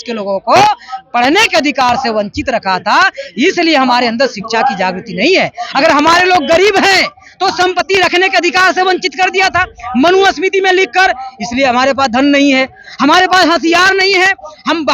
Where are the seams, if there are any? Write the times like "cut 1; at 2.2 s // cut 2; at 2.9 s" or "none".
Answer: none